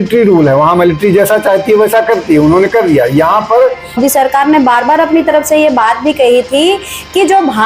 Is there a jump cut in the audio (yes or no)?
yes